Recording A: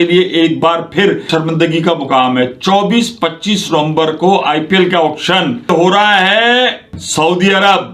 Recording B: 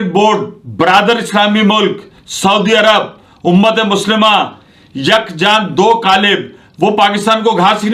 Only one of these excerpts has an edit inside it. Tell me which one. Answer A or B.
A